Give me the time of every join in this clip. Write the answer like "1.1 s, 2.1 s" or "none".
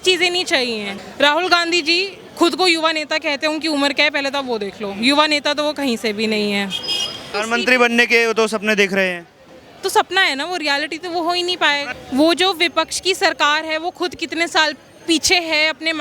0.9 s, 7.3 s, 11.9 s